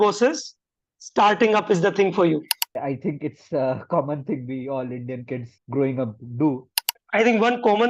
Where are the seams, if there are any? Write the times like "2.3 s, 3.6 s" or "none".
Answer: 2.8 s, 5.6 s, 6.9 s

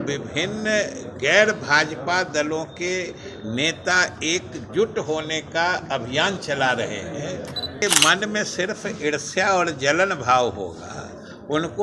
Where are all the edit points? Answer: 7.8 s

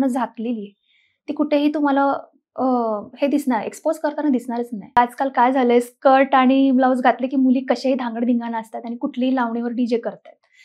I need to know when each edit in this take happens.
5.0 s

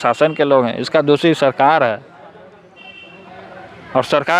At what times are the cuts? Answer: none

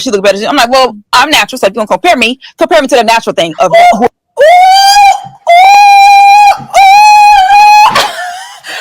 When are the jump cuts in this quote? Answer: none

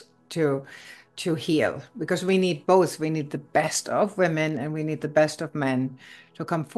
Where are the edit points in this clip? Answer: none

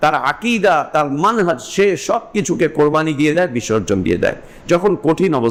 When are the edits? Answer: none

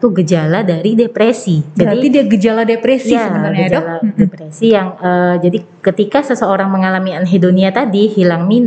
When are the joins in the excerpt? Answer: none

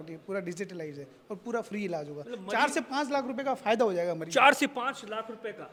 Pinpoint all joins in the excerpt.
none

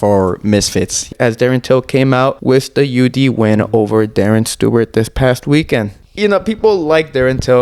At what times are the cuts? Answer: 1.1 s, 2.4 s, 6.0 s

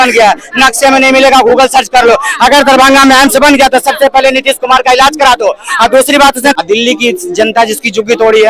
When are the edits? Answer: 6.6 s

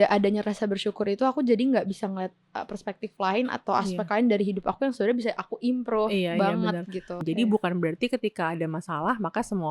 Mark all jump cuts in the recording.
7.1 s

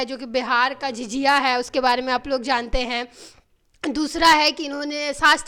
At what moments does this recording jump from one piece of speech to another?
none

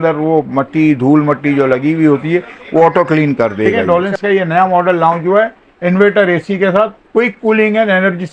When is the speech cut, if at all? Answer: 3.8 s

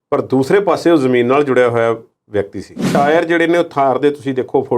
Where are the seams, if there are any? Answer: 2.9 s

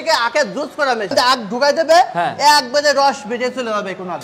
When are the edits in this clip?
1.1 s

